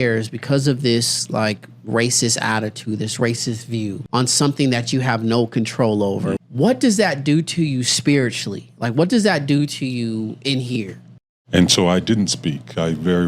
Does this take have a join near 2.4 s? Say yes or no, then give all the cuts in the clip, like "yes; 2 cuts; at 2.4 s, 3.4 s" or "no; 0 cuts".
no; 3 cuts; at 4.0 s, 6.4 s, 11.1 s